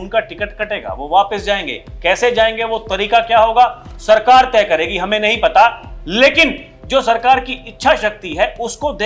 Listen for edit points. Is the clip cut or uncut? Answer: uncut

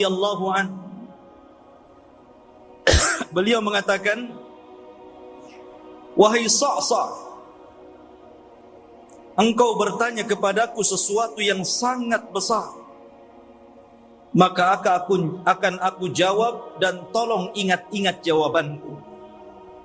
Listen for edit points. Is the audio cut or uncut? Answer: cut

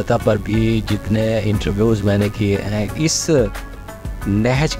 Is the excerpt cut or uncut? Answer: uncut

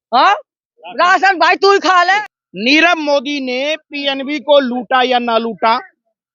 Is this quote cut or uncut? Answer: cut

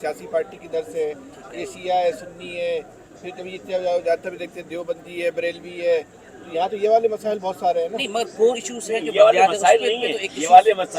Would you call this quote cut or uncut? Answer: uncut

